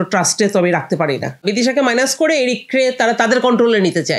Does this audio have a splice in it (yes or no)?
yes